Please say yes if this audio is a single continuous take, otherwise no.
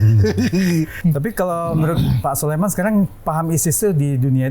no